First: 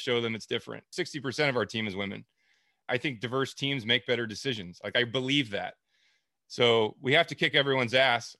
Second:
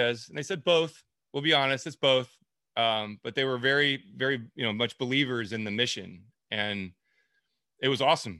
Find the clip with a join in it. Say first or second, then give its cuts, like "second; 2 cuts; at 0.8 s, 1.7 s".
first; 2 cuts; at 0.9 s, 2.8 s